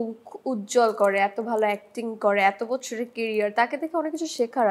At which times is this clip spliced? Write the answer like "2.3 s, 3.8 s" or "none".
none